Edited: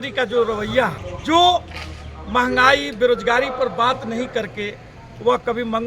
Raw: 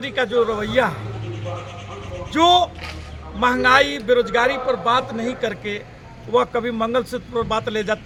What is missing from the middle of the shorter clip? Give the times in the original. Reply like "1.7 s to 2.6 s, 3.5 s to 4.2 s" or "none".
1.1 s to 2.1 s